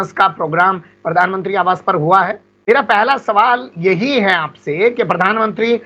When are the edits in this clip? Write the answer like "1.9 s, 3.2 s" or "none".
2.5 s